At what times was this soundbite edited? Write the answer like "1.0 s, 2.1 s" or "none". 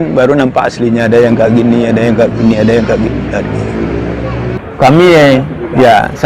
4.6 s